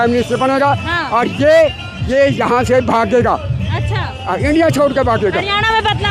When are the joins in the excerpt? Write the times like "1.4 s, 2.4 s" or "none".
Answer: none